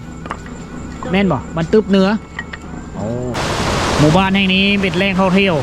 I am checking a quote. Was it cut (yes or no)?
yes